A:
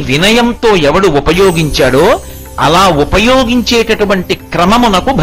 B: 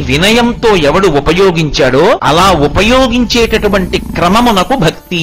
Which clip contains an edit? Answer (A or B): B